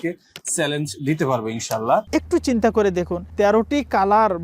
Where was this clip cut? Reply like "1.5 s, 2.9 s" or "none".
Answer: 2.1 s